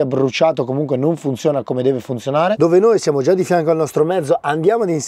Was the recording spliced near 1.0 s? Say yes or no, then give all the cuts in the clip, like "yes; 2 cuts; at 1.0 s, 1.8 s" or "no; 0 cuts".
no; 1 cut; at 2.6 s